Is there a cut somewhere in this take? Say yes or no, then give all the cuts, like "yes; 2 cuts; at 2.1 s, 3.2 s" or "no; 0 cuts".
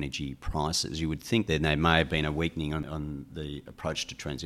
yes; 2 cuts; at 1.5 s, 2.8 s